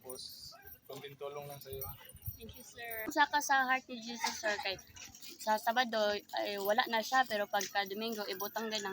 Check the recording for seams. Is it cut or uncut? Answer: cut